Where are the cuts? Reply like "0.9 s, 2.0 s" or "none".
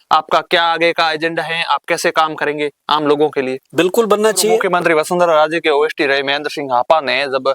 4.6 s